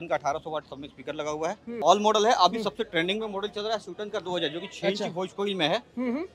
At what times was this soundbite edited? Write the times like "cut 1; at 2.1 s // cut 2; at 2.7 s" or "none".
cut 1; at 1.8 s